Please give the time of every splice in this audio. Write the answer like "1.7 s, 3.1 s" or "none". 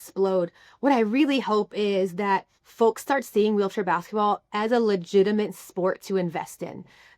2.6 s

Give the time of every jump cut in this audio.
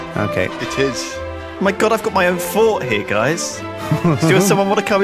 none

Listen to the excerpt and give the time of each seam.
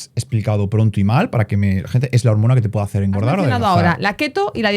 3.5 s

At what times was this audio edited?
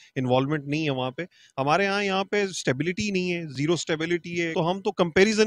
4.5 s

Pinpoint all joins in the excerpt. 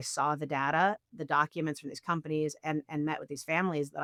none

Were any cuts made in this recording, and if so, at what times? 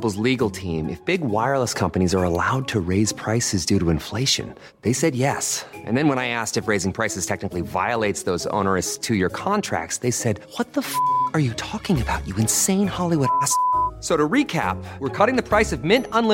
none

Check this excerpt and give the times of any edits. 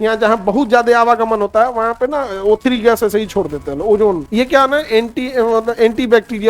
4.2 s

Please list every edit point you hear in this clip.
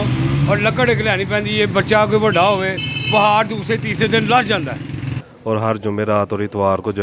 5.1 s

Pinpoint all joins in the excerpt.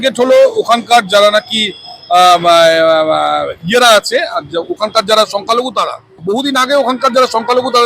6.2 s

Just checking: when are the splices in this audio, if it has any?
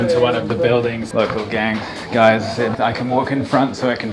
1.1 s, 2.7 s

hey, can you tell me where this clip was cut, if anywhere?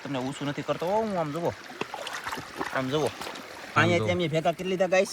3.8 s

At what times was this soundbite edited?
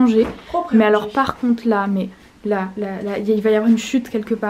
none

